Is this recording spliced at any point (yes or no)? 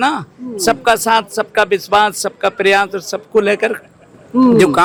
no